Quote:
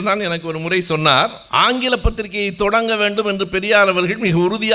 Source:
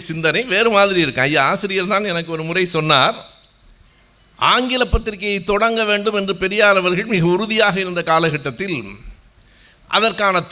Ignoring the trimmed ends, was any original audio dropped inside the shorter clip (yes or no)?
yes